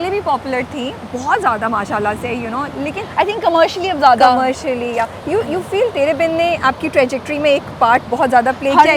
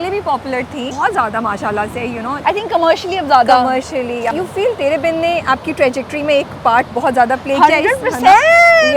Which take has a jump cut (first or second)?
second